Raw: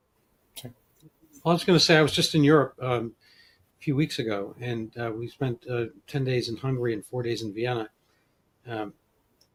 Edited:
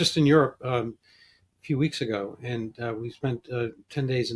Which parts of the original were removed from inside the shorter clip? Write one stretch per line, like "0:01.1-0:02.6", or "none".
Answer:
none